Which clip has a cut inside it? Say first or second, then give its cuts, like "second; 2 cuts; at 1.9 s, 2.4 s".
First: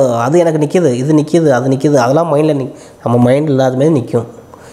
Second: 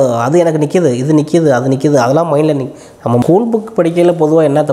second; 1 cut; at 3.2 s